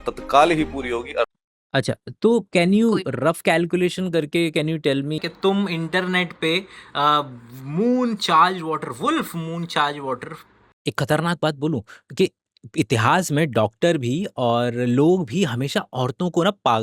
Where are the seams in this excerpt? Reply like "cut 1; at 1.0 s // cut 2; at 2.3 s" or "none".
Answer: cut 1; at 1.3 s // cut 2; at 5.2 s // cut 3; at 10.6 s